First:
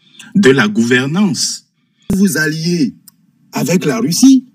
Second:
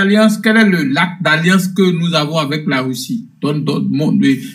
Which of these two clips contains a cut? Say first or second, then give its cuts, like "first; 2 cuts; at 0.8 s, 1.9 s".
first; 1 cut; at 2.1 s